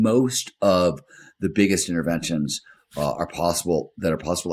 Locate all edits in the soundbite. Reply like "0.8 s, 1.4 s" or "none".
none